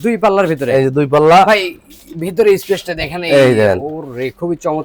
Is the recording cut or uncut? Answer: uncut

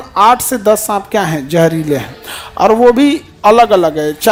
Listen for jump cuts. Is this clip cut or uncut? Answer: uncut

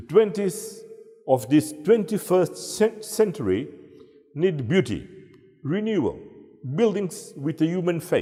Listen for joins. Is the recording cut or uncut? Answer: uncut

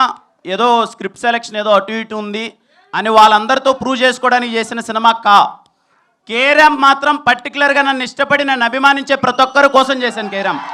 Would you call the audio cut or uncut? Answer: uncut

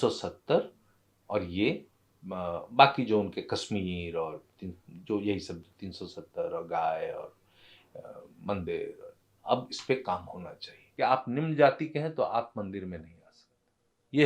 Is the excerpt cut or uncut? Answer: cut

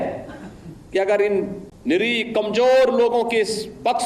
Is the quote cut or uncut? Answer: cut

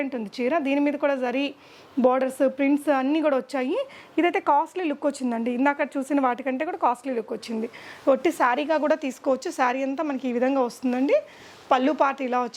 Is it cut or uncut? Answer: uncut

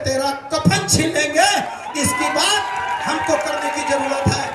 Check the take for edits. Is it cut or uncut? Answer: uncut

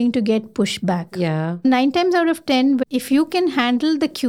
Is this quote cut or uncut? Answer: cut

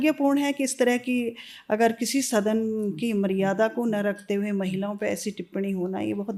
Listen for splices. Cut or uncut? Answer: uncut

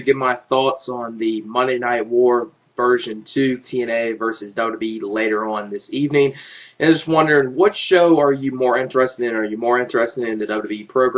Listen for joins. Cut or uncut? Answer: uncut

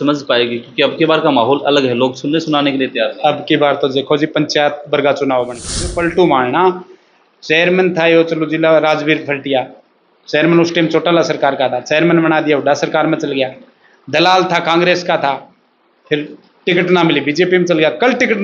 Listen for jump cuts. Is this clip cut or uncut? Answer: cut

